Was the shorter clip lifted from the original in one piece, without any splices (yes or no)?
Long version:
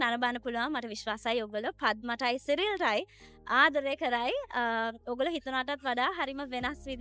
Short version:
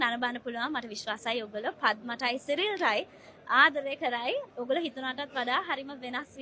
no